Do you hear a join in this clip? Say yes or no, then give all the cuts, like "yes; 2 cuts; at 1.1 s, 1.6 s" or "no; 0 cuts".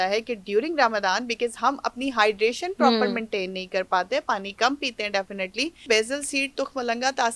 yes; 1 cut; at 5.8 s